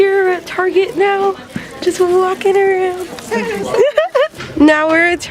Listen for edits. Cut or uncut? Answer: cut